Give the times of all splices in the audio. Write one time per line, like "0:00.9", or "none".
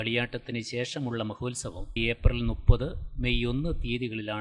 0:02.0